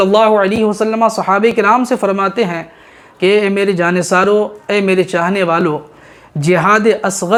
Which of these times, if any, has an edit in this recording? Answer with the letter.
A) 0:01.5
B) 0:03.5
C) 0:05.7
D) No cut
D